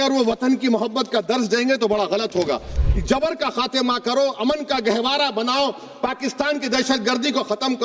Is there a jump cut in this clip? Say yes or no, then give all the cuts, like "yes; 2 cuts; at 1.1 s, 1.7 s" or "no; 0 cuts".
yes; 1 cut; at 2.7 s